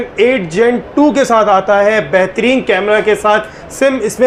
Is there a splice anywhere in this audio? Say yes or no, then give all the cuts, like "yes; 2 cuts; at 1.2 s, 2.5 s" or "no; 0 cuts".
no; 0 cuts